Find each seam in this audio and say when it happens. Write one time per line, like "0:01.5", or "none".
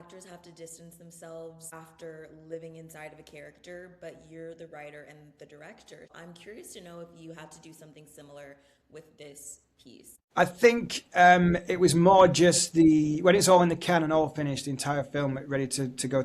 0:01.6
0:06.1
0:10.2